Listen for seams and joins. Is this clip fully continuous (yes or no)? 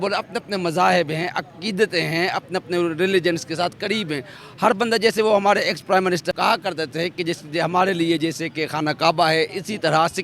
no